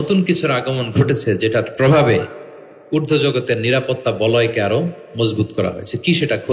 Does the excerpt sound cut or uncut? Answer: uncut